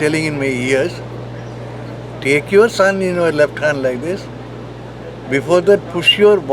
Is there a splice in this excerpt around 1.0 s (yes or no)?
no